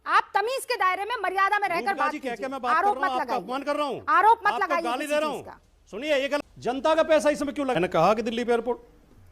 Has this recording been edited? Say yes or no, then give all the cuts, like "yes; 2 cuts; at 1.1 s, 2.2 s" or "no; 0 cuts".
yes; 1 cut; at 6.4 s